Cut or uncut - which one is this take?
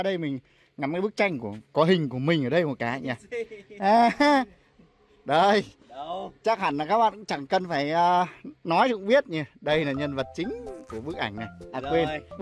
uncut